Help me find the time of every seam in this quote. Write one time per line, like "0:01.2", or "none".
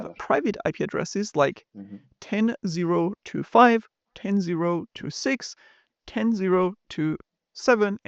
none